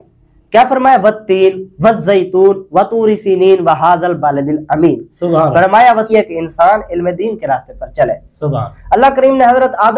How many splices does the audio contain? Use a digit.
1